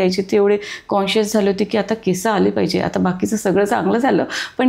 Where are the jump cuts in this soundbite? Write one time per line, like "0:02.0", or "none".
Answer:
none